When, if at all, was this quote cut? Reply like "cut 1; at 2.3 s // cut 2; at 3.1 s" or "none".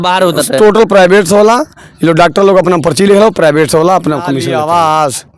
cut 1; at 4.5 s